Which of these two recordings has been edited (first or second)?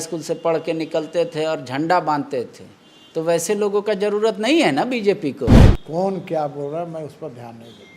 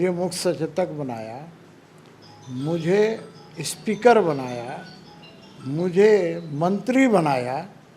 first